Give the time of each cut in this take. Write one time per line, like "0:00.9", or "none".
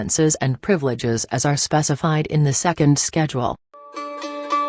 none